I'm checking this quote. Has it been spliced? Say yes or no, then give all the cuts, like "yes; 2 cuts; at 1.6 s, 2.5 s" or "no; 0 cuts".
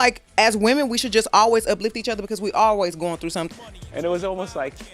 yes; 1 cut; at 3.5 s